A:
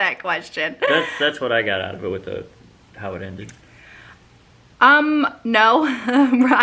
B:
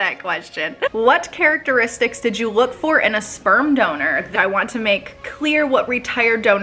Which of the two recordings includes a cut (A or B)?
B